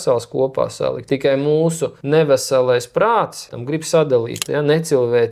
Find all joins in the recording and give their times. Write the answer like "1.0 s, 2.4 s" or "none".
1.0 s, 1.9 s, 3.6 s, 4.4 s